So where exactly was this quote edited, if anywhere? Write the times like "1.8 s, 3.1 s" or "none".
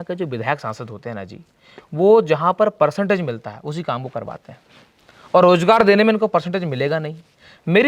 none